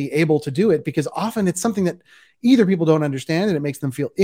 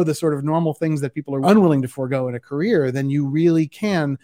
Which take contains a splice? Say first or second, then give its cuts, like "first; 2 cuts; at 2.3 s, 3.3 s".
second; 1 cut; at 1.4 s